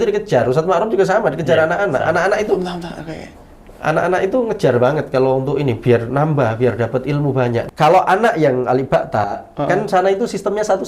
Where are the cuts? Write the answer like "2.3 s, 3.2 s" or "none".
7.6 s